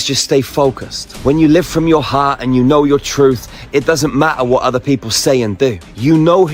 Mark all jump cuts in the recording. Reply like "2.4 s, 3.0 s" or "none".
none

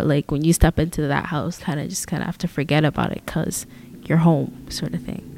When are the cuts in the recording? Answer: 1.6 s, 4.0 s

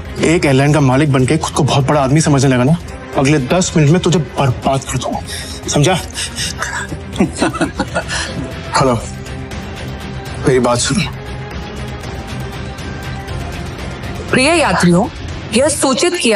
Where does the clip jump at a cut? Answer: 3.0 s, 8.2 s, 12.0 s

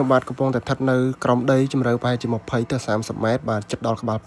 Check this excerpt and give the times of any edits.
none

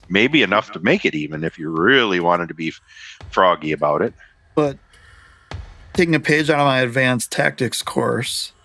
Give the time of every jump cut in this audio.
none

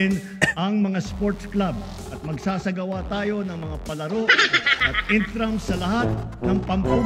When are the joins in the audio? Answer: none

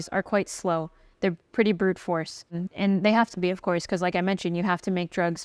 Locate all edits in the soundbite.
2.6 s

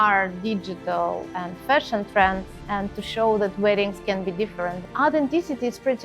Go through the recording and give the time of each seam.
1.3 s, 2.5 s, 4.8 s

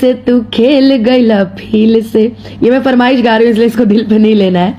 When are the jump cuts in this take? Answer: none

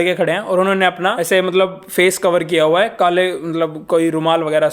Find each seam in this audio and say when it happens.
1.2 s

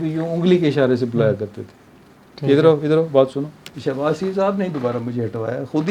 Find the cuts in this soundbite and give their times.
3.7 s

